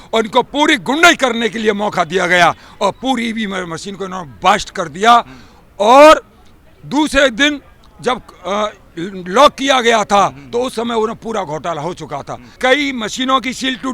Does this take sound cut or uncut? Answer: cut